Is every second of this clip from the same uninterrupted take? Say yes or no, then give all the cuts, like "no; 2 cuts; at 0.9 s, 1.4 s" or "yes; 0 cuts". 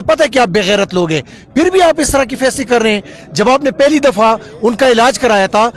yes; 0 cuts